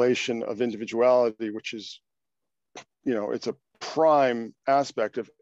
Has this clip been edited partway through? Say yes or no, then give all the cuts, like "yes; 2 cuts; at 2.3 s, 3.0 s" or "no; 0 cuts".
no; 0 cuts